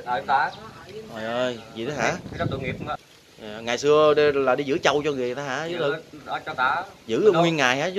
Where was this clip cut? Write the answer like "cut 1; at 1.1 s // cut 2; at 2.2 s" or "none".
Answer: cut 1; at 3.0 s